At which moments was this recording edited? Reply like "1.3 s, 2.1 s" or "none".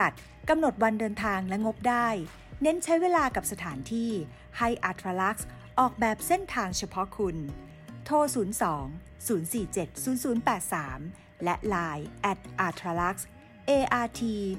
none